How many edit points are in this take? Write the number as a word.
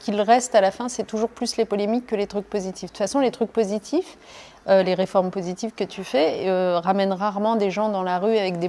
zero